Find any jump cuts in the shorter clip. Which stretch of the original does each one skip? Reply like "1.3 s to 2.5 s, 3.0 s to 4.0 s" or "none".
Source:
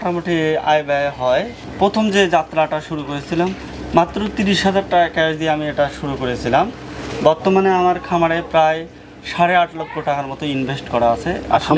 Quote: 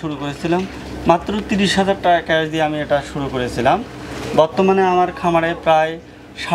none